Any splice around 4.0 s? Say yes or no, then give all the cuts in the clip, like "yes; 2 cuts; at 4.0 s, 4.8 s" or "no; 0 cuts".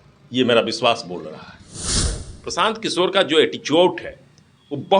no; 1 cut; at 2.1 s